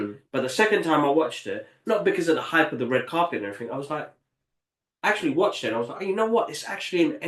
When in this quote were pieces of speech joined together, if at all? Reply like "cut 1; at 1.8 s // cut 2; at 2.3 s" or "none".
none